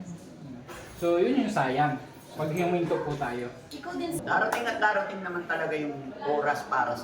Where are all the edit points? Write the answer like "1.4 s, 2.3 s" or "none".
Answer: 4.2 s

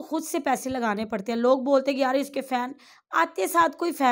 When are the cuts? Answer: none

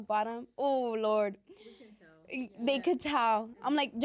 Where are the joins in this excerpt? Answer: none

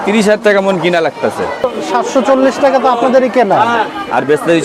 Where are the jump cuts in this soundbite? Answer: 1.7 s

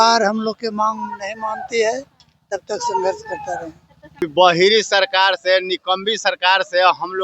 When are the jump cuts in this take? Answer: 4.2 s

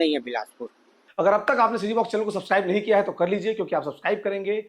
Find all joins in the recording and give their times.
1.0 s

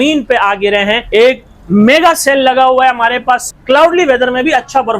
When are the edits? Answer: 1.0 s, 3.5 s

